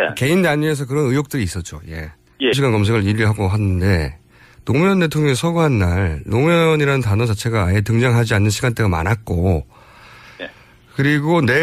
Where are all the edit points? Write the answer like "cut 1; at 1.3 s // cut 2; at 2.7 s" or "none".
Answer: none